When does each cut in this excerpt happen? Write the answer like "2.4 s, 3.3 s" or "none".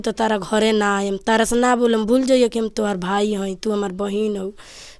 none